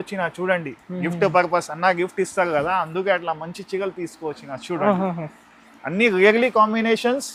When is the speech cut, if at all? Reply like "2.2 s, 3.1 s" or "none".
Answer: none